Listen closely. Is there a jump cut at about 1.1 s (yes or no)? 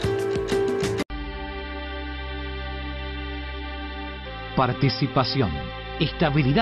yes